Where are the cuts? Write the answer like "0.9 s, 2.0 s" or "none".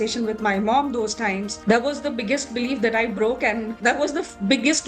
1.5 s, 3.8 s